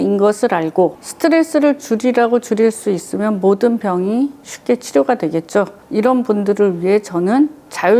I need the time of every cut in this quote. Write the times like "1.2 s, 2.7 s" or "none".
1.1 s